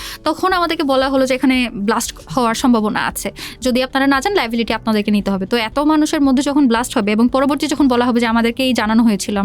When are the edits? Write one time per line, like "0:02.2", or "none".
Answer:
none